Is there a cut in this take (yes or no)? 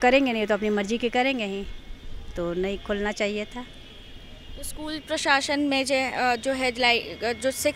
no